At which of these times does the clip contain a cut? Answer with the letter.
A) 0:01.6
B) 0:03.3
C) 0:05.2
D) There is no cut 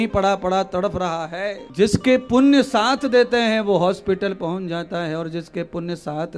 A